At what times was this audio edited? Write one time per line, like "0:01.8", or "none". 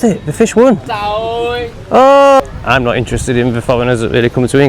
0:01.0
0:02.4